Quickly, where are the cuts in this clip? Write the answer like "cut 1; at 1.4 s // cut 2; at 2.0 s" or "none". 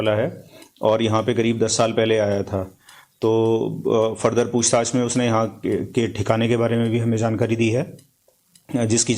cut 1; at 3.5 s